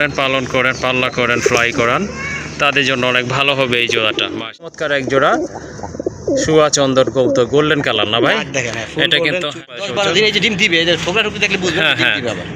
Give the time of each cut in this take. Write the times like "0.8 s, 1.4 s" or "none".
4.7 s, 9.8 s